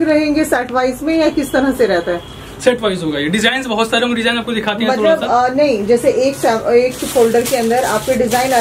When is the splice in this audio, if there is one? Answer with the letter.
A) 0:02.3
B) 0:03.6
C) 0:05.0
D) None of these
D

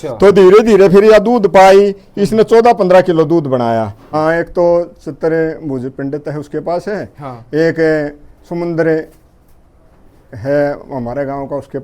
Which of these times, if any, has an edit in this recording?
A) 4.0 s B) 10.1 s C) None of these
A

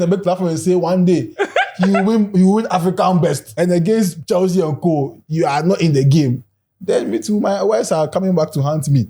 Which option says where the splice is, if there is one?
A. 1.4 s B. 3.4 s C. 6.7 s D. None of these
B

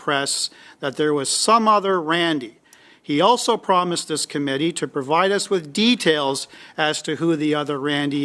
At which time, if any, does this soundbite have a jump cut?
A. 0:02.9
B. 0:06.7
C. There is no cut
C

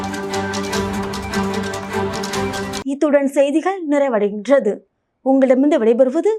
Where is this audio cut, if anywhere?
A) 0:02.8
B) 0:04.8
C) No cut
C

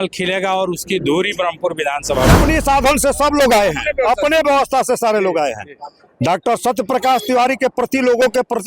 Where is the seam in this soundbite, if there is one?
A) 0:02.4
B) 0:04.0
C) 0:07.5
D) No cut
A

